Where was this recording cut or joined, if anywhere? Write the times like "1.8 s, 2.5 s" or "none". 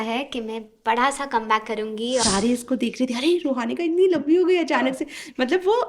2.2 s